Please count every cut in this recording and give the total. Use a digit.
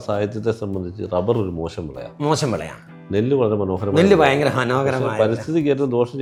0